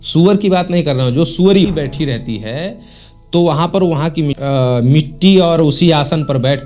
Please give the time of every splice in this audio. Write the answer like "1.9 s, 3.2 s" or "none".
1.7 s, 4.4 s